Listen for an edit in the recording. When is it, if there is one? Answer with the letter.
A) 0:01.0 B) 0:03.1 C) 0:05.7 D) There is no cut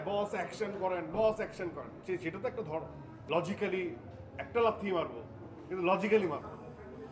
B